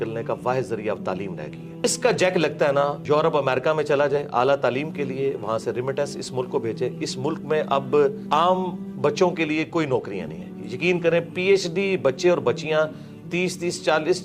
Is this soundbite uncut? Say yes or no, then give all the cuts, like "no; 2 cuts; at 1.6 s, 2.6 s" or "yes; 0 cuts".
no; 3 cuts; at 1.8 s, 3.0 s, 8.2 s